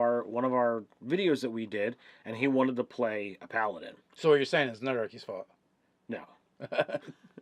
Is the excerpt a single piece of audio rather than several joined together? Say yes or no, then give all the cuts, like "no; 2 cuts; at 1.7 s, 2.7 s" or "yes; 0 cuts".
no; 1 cut; at 2.4 s